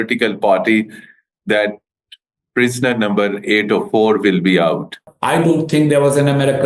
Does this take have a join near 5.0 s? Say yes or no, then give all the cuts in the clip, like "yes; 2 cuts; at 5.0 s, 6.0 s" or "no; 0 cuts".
yes; 1 cut; at 5.0 s